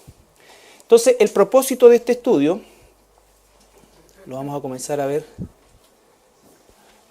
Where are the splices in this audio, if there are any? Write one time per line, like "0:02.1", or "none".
0:02.8